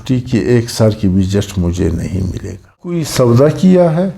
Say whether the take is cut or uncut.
cut